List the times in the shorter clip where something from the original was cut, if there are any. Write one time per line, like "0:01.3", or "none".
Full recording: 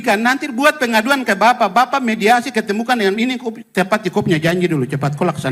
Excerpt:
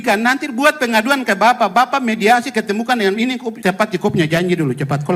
0:03.5

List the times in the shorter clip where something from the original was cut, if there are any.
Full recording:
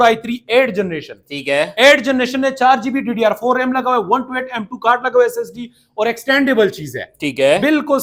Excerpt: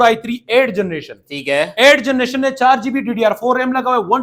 none

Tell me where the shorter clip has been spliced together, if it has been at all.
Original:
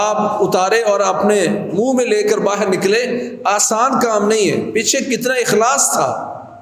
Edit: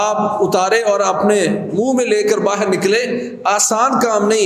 none

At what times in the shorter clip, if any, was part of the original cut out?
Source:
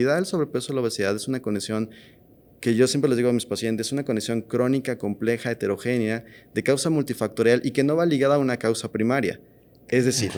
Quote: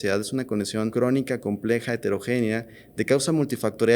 0:00.9

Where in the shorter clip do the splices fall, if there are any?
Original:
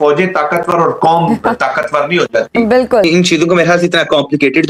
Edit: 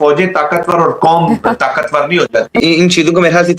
0:02.7

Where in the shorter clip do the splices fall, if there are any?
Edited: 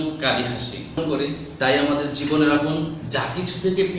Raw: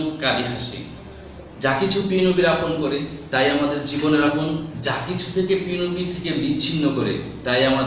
0:01.0

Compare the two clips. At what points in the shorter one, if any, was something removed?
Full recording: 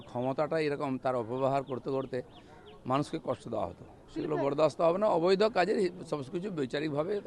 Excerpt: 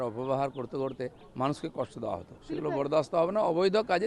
0:01.2
0:02.3

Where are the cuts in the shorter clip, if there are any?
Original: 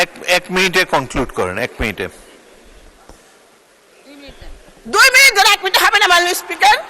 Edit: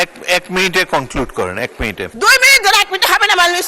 0:02.1

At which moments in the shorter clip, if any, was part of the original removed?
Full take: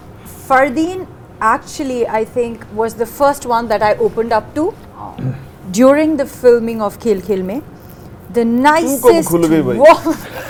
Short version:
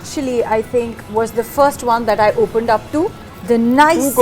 0:03.3

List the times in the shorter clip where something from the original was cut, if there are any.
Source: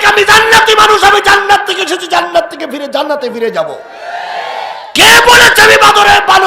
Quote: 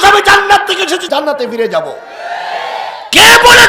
0:01.0

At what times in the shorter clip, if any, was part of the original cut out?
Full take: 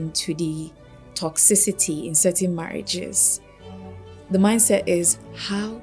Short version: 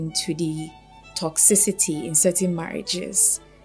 none

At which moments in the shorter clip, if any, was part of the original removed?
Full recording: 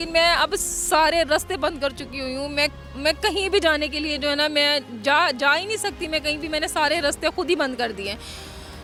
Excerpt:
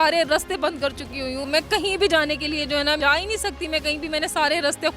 0:01.4
0:03.0

